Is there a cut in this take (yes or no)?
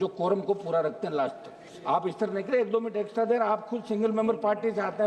no